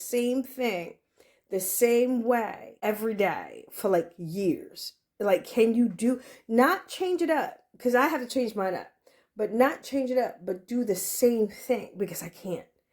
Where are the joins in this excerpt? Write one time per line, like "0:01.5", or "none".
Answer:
0:02.6